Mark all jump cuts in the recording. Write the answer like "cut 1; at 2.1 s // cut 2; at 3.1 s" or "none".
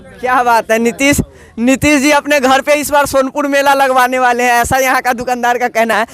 none

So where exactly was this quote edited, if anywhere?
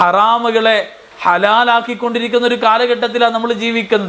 none

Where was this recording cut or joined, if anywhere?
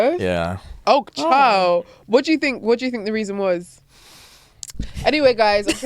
cut 1; at 4.8 s

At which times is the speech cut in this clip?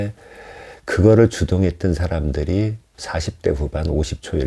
cut 1; at 2.9 s

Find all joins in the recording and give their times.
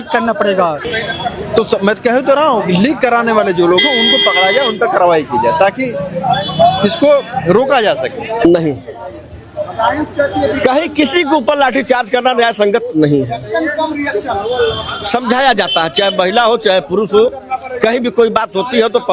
cut 1; at 0.8 s // cut 2; at 8.4 s

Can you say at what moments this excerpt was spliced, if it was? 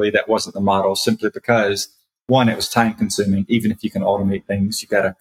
none

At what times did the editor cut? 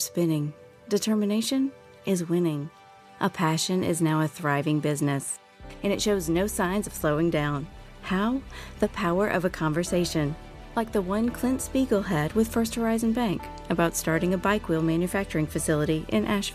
none

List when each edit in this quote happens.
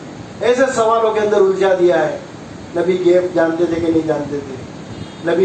none

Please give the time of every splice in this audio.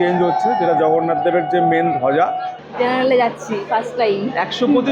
cut 1; at 2.7 s

